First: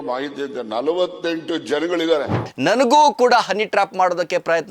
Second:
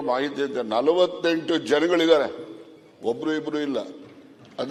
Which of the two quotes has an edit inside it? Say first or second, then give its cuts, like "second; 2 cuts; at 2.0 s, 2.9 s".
first; 1 cut; at 2.5 s